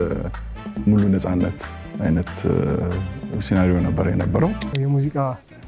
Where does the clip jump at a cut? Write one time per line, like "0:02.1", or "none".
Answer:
0:04.7

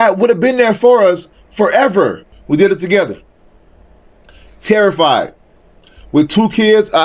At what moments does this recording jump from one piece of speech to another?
0:02.3

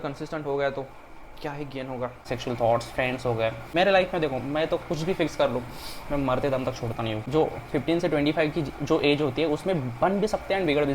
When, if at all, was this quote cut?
0:02.3
0:03.7
0:07.2

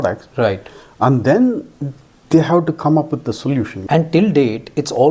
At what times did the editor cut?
0:03.8

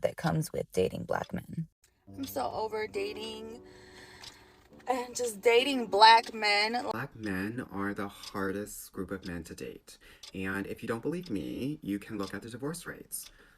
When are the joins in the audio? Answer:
0:02.3
0:06.8

